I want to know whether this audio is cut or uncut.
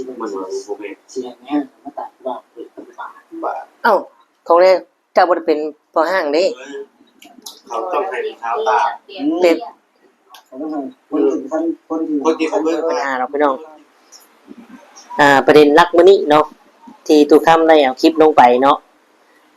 cut